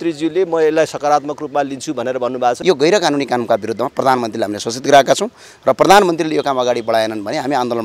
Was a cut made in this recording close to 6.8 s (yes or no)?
no